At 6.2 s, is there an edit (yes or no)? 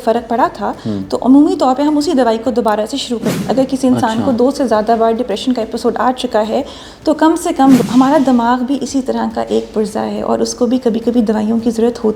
no